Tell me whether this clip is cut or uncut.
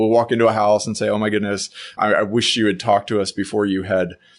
cut